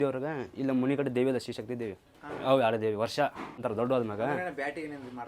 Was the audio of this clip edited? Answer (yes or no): yes